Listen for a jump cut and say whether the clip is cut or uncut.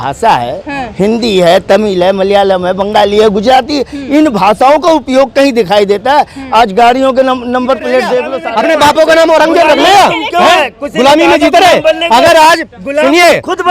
cut